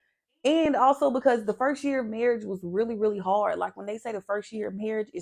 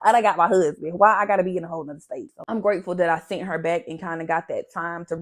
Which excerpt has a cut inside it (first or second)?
second